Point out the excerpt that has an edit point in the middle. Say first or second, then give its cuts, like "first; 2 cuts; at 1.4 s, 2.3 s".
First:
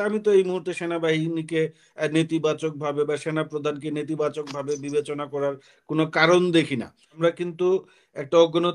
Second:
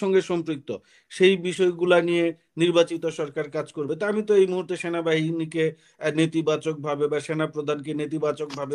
first; 1 cut; at 7.1 s